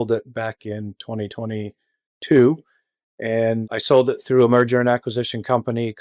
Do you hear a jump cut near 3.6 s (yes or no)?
yes